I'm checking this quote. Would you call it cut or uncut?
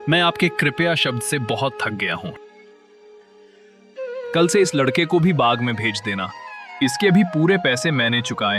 uncut